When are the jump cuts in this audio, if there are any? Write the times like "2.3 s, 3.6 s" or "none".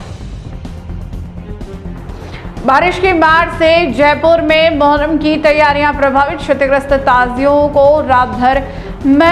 none